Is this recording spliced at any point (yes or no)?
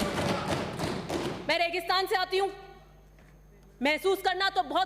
no